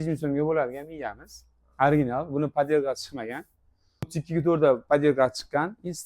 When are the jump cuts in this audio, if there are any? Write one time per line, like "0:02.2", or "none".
0:04.1